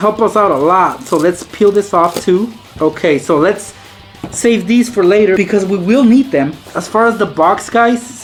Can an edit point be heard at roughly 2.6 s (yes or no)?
no